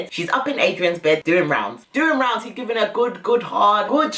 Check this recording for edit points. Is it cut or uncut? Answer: cut